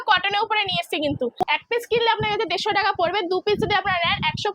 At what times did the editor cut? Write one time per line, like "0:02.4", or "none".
0:01.5